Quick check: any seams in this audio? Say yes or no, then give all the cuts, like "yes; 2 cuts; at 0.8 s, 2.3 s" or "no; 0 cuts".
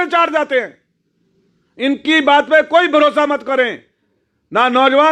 no; 0 cuts